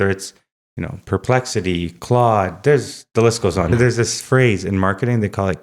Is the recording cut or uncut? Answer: cut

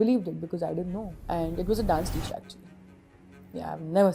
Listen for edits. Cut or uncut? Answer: cut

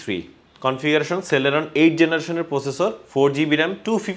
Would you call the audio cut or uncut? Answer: uncut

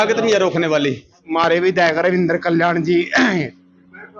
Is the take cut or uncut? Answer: cut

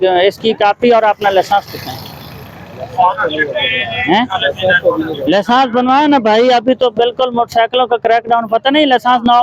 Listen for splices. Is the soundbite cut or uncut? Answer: uncut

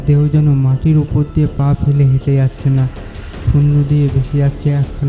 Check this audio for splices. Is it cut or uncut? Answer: uncut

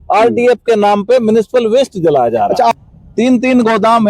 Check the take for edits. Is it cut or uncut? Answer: cut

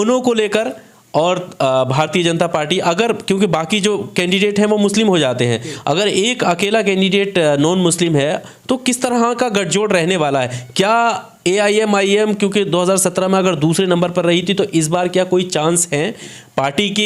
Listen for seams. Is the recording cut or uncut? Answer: uncut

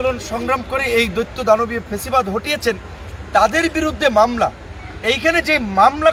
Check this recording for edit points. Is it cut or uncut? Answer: uncut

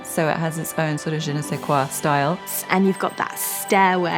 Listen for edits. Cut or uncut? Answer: cut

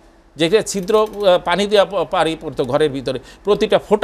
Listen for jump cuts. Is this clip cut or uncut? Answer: uncut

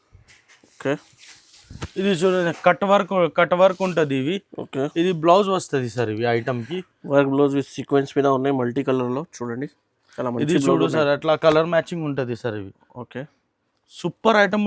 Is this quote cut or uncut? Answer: uncut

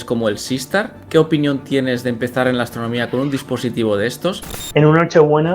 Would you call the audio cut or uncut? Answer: cut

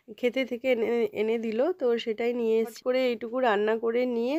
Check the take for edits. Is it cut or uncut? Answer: cut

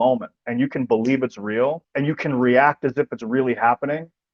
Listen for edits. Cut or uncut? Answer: cut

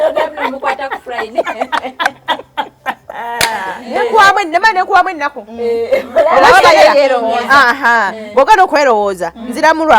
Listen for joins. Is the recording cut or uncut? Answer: cut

